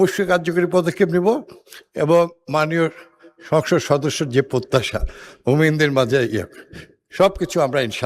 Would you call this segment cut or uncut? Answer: uncut